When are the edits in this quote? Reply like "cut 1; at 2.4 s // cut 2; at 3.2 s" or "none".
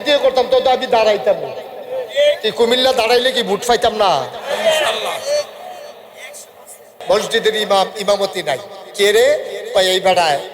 cut 1; at 6.9 s